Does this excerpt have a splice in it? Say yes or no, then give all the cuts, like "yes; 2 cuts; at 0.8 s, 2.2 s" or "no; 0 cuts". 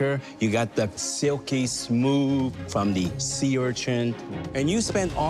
yes; 1 cut; at 4.2 s